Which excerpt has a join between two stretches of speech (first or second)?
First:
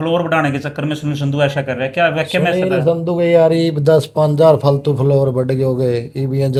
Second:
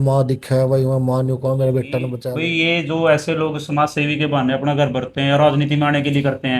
second